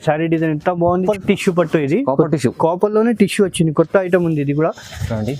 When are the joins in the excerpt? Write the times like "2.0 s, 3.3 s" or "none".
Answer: 1.0 s